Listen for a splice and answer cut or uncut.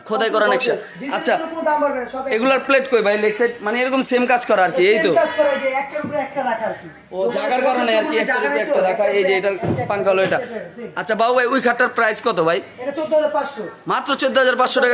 uncut